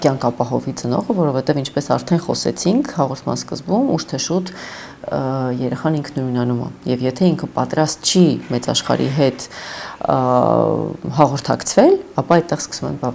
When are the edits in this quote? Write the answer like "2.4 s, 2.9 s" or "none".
none